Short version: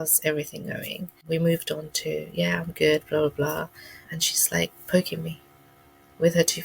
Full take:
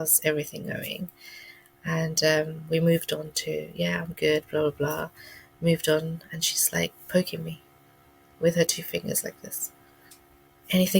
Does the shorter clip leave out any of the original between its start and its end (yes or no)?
yes